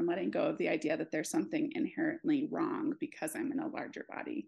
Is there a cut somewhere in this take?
no; 0 cuts

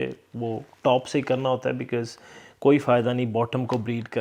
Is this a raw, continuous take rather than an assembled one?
yes; 0 cuts

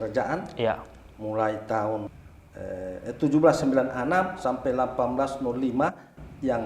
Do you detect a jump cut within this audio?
yes; 1 cut; at 2.1 s

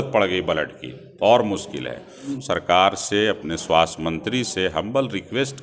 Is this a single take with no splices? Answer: no; 1 cut; at 2.3 s

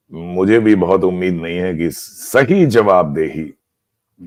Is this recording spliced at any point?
no; 0 cuts

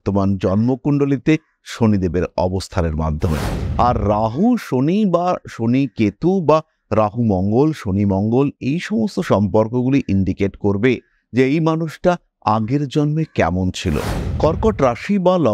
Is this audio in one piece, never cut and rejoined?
no; 1 cut; at 14.2 s

